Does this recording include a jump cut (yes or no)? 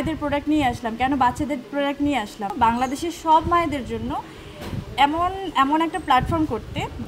yes